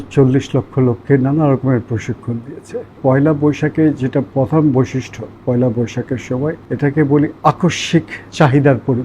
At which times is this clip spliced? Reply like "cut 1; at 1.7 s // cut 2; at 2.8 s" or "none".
cut 1; at 3.0 s // cut 2; at 6.6 s // cut 3; at 8.2 s